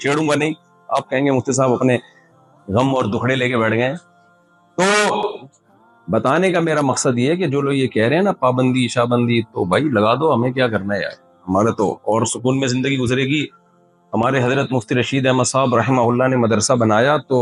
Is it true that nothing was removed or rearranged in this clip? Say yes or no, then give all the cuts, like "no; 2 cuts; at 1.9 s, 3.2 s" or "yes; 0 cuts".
yes; 0 cuts